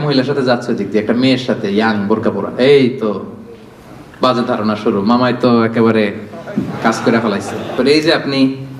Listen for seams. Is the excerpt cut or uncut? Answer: cut